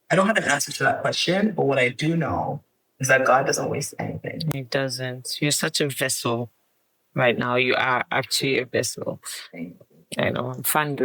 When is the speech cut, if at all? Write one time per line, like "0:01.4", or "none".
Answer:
none